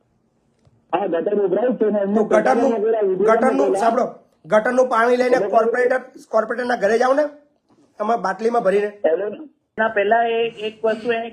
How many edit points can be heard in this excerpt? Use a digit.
1